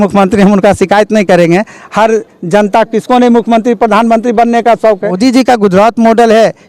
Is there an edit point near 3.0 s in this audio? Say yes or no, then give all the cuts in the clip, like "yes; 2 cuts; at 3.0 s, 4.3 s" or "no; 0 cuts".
no; 1 cut; at 5.2 s